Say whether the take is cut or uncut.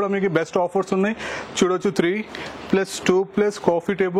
uncut